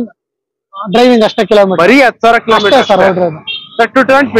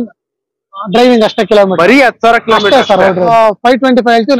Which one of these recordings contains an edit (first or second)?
second